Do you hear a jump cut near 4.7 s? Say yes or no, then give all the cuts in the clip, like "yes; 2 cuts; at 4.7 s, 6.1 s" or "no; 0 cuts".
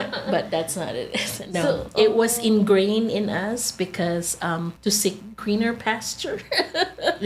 yes; 1 cut; at 4.7 s